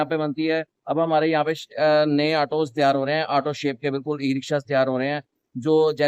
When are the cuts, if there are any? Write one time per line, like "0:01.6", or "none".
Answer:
none